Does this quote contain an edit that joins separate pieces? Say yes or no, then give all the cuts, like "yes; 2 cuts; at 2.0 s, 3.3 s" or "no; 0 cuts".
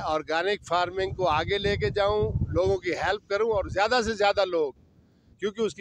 no; 0 cuts